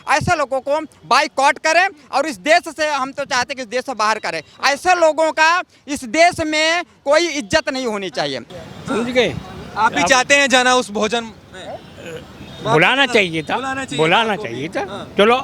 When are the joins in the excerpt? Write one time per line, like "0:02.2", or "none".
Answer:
0:08.4